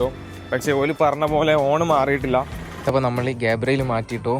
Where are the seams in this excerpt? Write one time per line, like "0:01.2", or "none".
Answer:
0:02.7